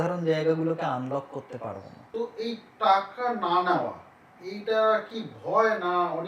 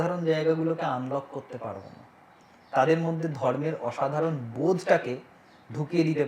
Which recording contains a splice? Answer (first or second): first